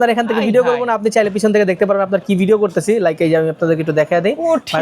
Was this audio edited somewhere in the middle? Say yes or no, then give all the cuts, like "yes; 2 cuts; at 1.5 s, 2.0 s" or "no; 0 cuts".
no; 0 cuts